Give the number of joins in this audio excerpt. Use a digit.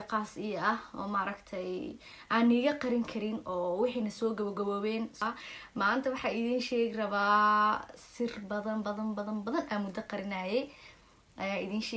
2